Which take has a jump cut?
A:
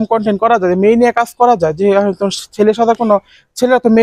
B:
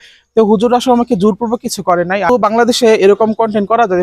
B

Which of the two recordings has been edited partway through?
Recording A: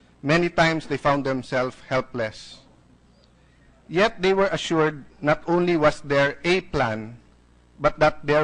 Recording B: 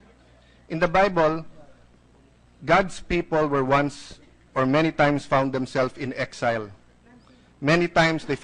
B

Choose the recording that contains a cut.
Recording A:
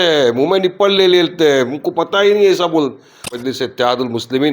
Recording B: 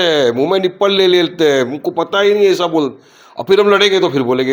A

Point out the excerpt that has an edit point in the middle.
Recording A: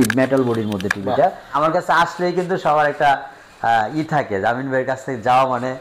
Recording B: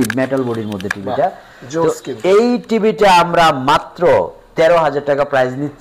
A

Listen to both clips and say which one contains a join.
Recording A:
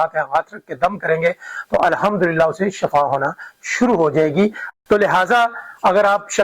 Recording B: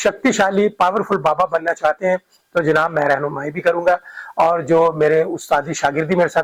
A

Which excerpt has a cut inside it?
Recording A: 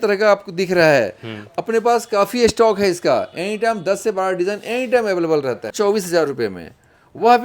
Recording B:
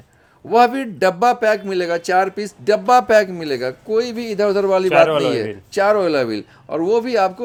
A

